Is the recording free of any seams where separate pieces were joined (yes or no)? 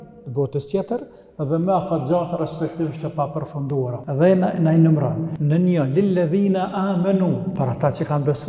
no